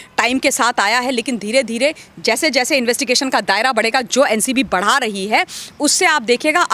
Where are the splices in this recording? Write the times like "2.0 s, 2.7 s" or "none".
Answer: none